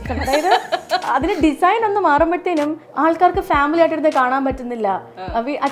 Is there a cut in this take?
yes; 2 cuts; at 1.0 s, 2.9 s

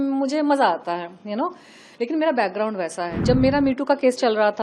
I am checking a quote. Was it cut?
yes; 1 cut; at 3.1 s

